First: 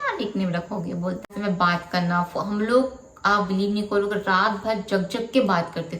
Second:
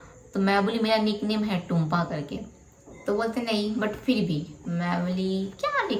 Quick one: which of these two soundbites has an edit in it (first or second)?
first